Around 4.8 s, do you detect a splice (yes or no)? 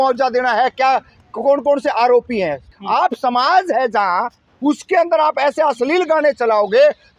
no